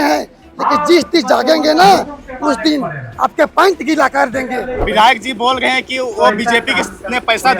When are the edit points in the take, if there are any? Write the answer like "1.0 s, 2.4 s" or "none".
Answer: 4.8 s